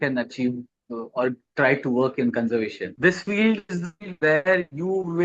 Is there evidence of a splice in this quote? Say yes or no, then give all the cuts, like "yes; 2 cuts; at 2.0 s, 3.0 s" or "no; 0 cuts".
yes; 1 cut; at 2.8 s